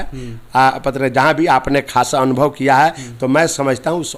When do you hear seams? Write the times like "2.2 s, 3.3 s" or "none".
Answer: none